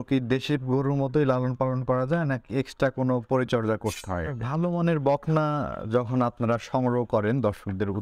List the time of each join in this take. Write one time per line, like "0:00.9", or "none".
0:04.4